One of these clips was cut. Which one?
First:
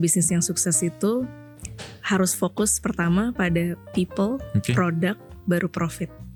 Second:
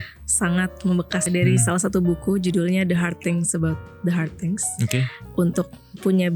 second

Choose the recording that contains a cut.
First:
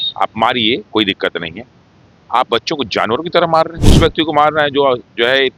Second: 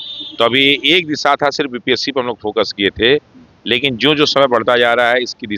first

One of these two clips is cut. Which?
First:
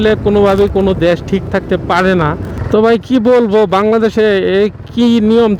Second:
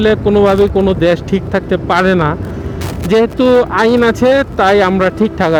first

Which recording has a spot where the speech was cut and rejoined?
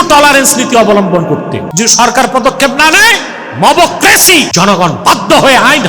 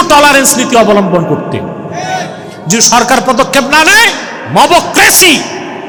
first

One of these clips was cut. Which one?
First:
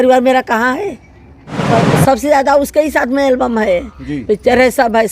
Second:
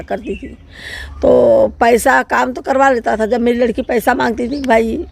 first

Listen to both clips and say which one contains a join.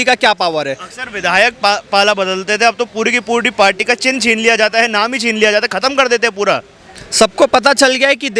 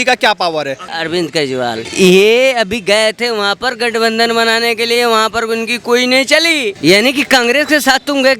second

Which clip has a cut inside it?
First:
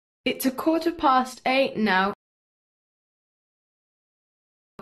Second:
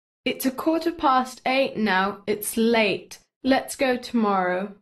second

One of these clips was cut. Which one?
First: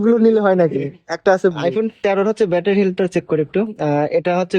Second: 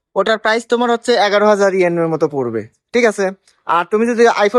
first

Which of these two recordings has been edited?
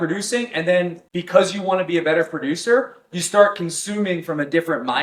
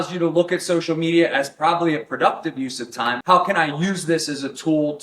second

